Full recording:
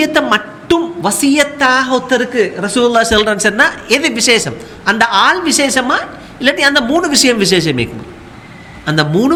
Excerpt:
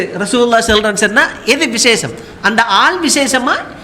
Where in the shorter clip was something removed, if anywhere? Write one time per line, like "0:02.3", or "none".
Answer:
none